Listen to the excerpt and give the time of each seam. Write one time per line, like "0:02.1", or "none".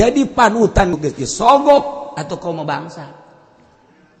0:00.9